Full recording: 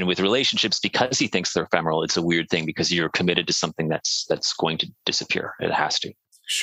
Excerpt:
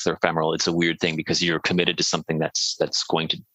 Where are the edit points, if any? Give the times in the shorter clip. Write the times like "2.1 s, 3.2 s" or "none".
none